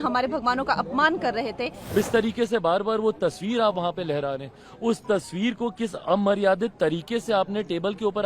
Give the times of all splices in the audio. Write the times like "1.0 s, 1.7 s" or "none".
1.9 s

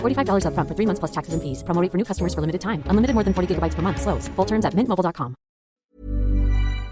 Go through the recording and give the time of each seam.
5.9 s

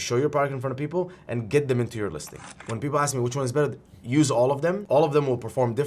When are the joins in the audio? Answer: 2.4 s, 4.8 s

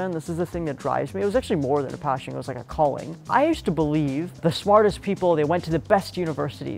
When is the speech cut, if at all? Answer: 3.1 s

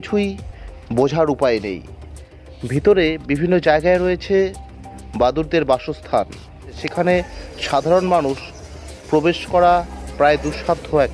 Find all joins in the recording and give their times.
6.8 s

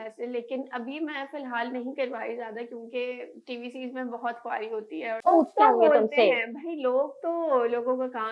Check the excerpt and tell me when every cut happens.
5.2 s

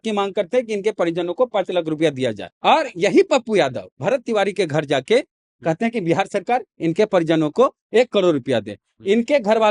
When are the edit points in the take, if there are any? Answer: 2.5 s

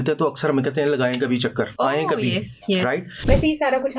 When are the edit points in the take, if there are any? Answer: 1.7 s, 3.1 s

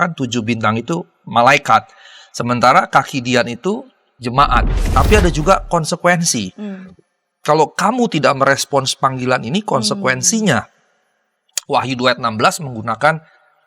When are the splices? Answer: 4.8 s

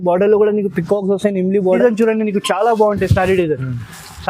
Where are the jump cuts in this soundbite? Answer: 1.8 s

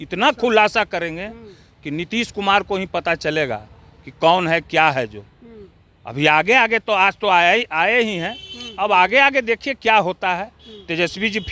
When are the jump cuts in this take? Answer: none

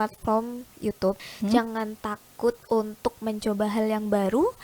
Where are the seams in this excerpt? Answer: 1.2 s

